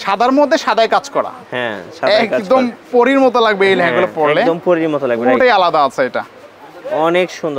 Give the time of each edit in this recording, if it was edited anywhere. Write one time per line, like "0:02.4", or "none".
none